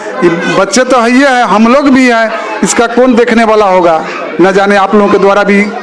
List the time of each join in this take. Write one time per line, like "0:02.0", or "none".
none